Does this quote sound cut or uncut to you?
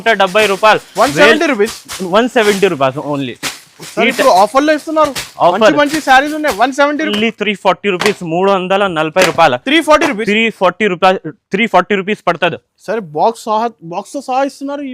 cut